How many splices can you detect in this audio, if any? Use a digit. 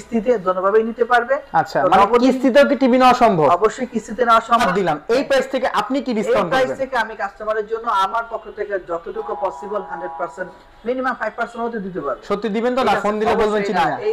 1